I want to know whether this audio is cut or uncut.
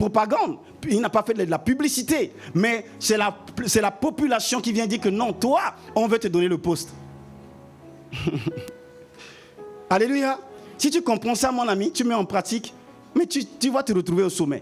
uncut